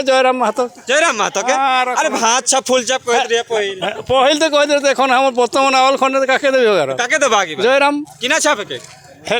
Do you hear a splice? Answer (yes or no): no